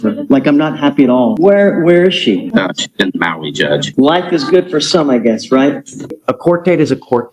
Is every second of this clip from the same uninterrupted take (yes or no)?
no